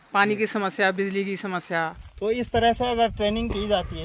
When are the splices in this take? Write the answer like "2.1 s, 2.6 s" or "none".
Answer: 2.0 s